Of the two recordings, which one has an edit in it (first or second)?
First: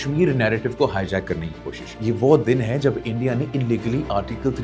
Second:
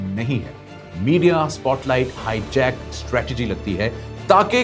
first